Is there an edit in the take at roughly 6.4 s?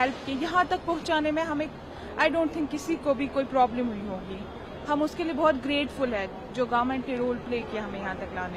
no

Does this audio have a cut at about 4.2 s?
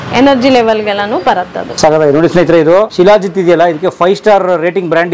no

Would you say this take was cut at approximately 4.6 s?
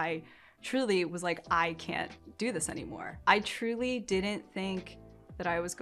no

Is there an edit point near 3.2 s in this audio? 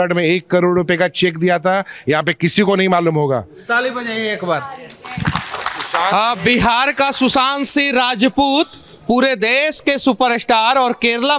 no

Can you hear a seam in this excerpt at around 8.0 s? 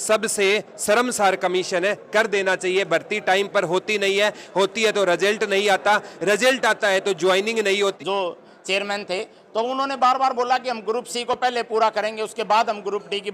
yes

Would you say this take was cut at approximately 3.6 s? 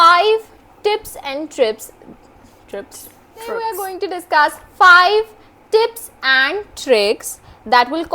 yes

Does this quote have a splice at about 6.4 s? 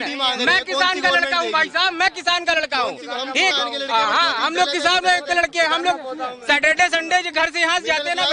no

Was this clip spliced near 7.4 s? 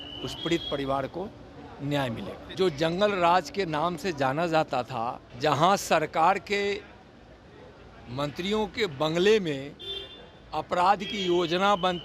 no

